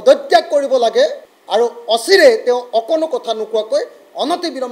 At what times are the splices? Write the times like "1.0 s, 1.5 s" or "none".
1.3 s